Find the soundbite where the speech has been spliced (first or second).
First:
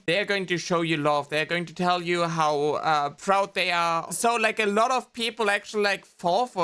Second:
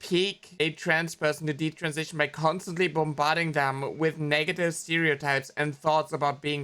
first